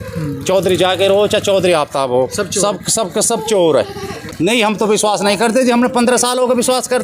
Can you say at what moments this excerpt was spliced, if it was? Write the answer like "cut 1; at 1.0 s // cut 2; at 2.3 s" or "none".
cut 1; at 4.2 s